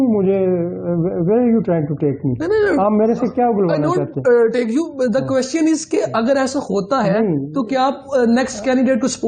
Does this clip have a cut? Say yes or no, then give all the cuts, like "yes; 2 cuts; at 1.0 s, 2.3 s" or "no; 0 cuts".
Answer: no; 0 cuts